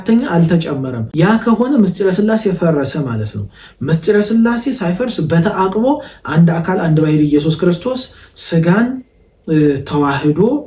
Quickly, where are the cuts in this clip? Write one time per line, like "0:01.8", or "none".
none